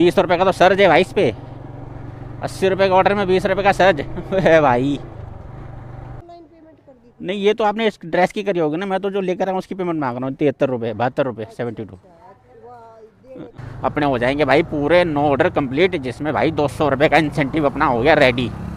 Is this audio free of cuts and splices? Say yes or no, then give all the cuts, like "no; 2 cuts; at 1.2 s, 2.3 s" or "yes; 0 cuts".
no; 2 cuts; at 6.2 s, 13.7 s